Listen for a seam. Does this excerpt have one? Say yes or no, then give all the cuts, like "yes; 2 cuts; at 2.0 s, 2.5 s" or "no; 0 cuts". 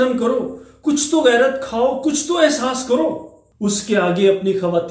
yes; 1 cut; at 3.4 s